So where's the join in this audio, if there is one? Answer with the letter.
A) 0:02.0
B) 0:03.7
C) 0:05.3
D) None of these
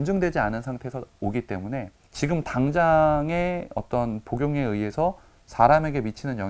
A